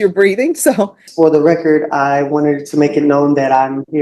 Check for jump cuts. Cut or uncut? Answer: cut